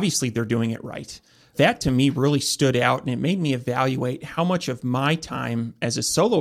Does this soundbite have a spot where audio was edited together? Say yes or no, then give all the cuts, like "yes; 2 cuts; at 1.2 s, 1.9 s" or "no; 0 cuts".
yes; 1 cut; at 1.5 s